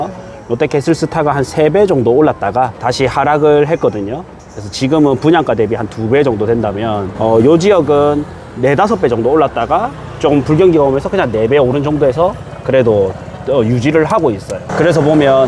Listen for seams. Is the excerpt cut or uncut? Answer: cut